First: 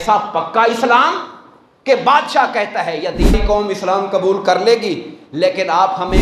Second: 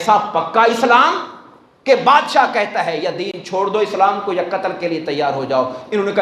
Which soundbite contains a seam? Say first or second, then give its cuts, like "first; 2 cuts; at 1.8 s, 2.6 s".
first; 1 cut; at 3.3 s